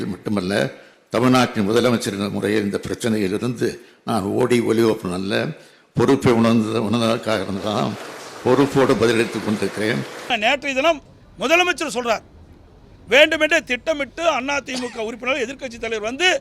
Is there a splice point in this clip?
yes; 1 cut; at 10.3 s

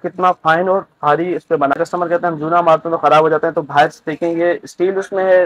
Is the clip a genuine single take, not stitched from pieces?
no; 1 cut; at 1.8 s

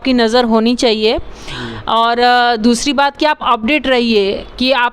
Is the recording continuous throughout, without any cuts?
yes; 0 cuts

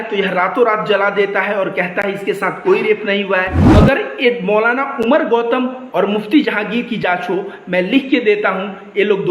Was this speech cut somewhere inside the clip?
yes; 1 cut; at 3.6 s

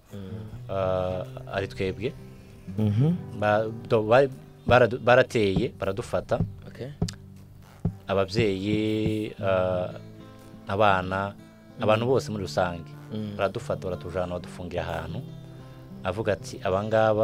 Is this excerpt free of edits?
yes; 0 cuts

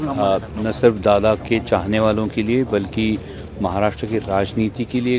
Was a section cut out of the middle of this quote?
no; 0 cuts

